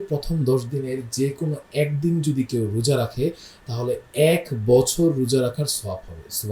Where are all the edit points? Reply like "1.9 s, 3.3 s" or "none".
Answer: none